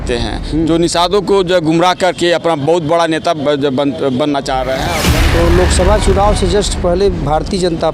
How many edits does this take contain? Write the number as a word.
one